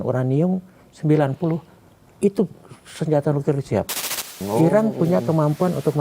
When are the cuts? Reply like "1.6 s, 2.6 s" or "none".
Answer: 4.3 s